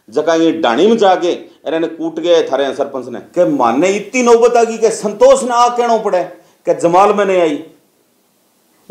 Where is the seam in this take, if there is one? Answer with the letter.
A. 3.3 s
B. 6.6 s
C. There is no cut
A